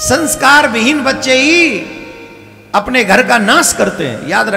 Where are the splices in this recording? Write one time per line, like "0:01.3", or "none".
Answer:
none